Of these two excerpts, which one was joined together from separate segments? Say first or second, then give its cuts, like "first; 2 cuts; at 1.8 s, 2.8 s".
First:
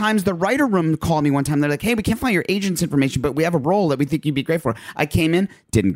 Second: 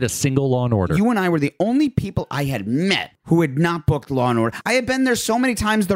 second; 3 cuts; at 0.9 s, 3.1 s, 4.7 s